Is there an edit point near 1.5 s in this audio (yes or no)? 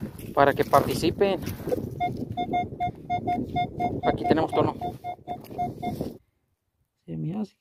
yes